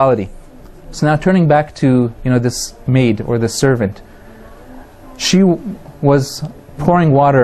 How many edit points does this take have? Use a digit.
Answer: 1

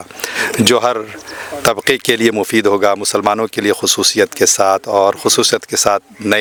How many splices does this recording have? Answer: 0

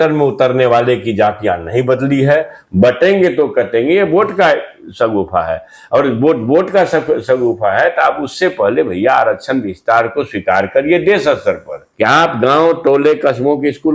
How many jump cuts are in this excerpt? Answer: 2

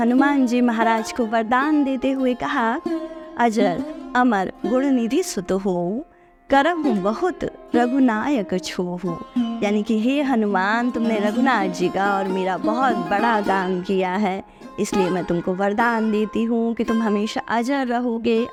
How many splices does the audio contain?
0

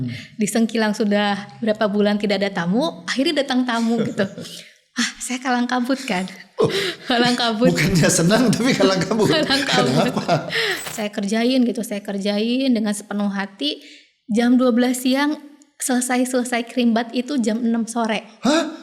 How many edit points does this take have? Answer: 1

